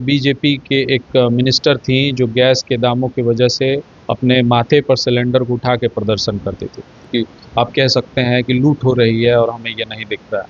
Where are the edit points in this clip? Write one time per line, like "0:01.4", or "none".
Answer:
0:07.1